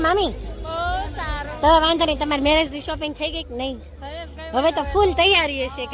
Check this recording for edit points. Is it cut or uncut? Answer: uncut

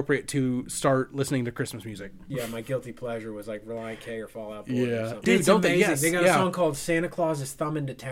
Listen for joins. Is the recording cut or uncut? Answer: cut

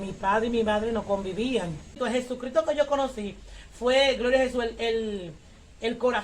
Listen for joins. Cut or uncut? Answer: cut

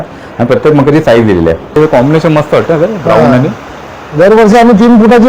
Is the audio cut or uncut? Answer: cut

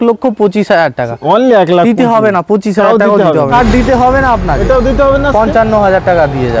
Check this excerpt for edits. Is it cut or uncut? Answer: cut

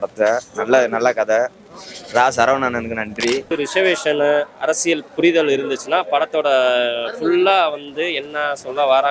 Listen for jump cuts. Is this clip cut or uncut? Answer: cut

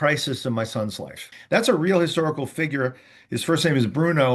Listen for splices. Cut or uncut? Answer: cut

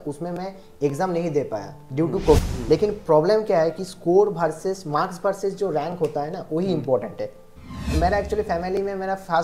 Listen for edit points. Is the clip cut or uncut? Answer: cut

